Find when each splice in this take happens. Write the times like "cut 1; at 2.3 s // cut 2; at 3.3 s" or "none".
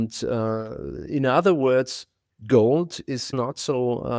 cut 1; at 3.3 s